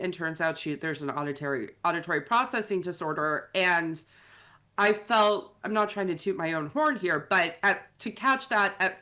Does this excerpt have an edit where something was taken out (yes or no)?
no